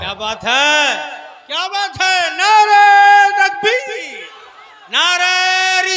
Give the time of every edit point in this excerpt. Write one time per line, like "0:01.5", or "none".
none